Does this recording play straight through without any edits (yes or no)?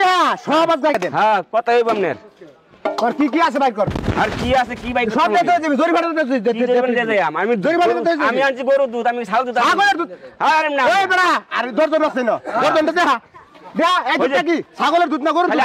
no